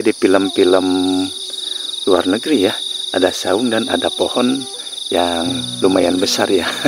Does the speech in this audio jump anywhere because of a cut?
no; 0 cuts

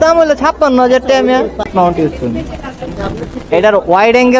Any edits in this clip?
yes; 1 cut; at 1.7 s

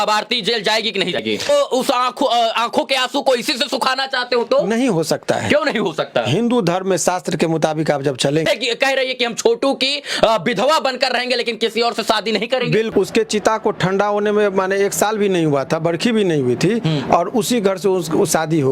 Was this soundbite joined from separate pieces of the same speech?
yes; 3 cuts; at 1.5 s, 8.4 s, 12.9 s

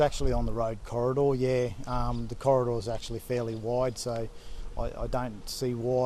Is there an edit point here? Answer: no; 0 cuts

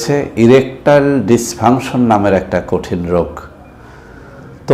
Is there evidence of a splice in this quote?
no; 0 cuts

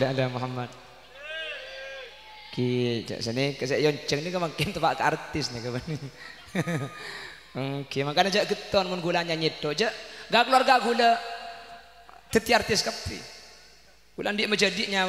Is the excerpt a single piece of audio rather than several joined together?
yes; 0 cuts

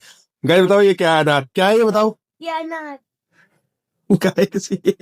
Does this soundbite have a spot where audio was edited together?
no; 0 cuts

